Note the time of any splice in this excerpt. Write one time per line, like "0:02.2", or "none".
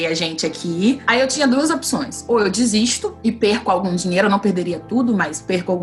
0:01.0